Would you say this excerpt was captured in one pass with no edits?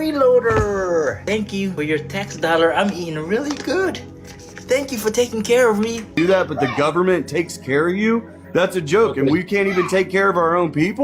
no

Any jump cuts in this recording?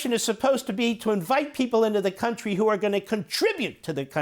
no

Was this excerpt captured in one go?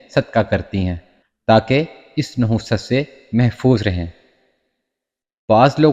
yes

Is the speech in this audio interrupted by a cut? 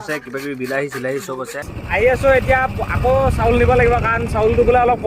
yes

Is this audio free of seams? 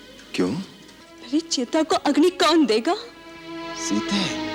yes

